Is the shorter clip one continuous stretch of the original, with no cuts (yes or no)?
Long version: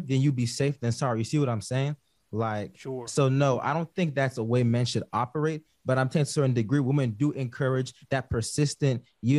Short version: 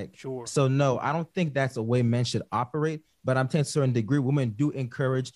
yes